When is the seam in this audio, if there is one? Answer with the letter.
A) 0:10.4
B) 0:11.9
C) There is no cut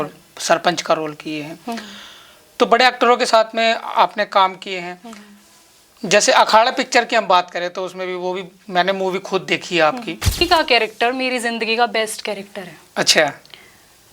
A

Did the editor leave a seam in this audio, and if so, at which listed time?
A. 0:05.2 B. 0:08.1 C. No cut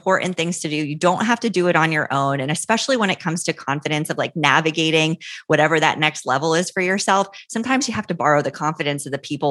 C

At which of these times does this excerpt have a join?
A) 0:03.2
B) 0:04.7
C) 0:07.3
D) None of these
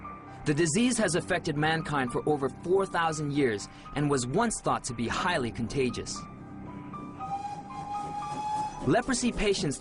A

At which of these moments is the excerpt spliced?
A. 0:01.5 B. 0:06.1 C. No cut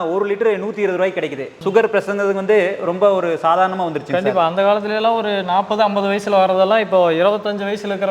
A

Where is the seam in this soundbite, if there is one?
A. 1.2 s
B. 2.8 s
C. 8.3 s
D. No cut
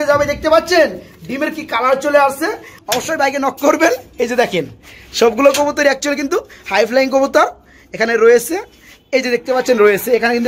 B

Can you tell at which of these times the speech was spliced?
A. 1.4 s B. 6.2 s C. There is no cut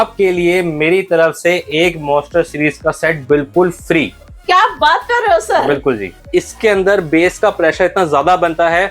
B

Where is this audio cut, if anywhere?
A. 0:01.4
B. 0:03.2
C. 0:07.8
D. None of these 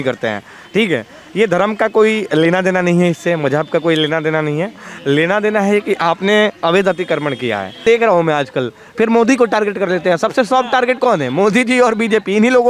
C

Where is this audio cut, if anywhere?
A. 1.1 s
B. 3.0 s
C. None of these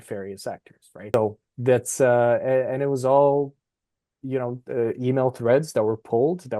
A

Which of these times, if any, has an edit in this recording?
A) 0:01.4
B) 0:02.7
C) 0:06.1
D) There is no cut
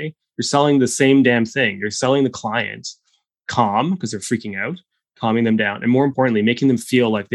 C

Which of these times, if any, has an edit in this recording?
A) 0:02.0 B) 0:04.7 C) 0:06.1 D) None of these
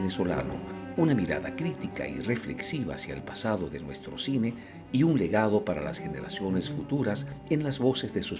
D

